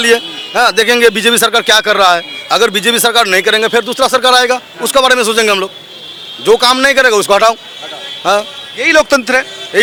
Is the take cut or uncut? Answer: uncut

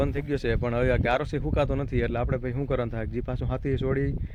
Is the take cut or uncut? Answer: uncut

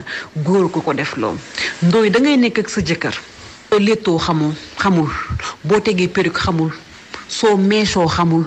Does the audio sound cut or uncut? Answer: cut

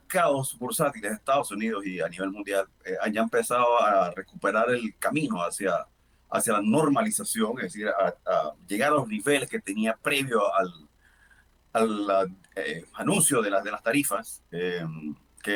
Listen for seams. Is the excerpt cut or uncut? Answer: uncut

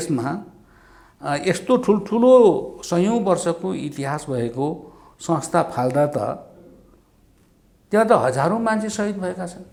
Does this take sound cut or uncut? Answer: uncut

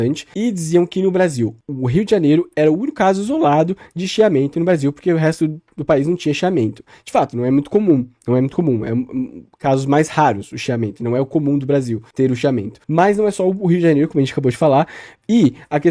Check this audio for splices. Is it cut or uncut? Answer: uncut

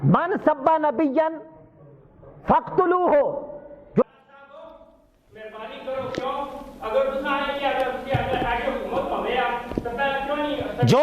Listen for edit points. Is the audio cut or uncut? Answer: cut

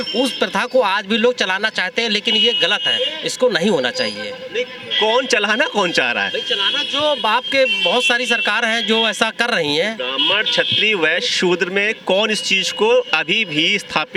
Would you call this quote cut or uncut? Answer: uncut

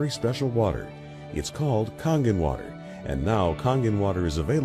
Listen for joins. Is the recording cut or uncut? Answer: uncut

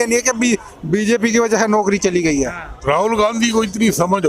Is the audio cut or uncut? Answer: cut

